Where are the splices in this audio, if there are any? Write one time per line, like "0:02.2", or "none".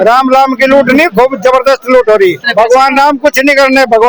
0:02.4